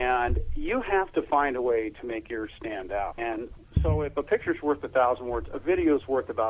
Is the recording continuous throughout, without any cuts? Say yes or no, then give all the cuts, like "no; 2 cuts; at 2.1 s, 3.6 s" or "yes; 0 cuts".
no; 1 cut; at 3.4 s